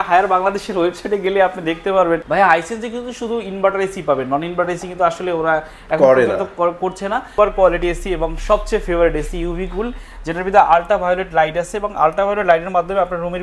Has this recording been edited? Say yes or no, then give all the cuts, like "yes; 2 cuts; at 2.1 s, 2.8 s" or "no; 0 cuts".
yes; 2 cuts; at 2.2 s, 7.3 s